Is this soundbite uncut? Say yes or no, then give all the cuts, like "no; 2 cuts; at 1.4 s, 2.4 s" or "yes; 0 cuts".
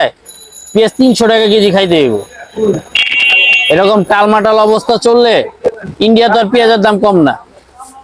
yes; 0 cuts